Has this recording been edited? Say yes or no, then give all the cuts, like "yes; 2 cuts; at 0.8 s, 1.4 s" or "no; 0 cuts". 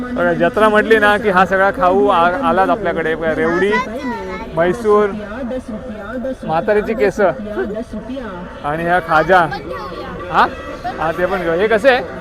no; 0 cuts